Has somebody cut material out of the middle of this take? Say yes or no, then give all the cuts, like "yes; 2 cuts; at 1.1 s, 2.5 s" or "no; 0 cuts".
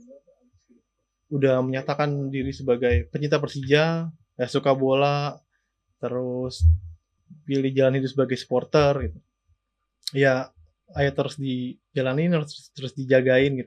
no; 0 cuts